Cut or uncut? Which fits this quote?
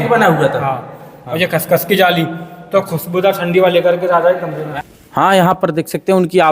cut